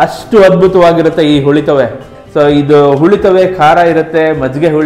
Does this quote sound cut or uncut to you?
cut